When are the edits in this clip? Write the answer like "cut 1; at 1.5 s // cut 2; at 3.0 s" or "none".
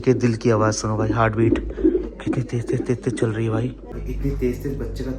cut 1; at 3.9 s